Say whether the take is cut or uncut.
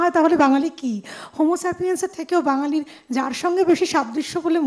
uncut